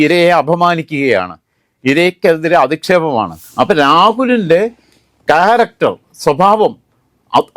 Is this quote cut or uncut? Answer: cut